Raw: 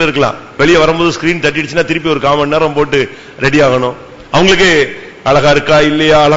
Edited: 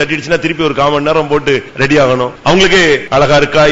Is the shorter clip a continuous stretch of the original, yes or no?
no